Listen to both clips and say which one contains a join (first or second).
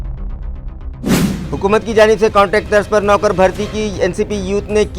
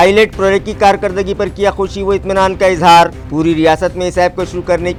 first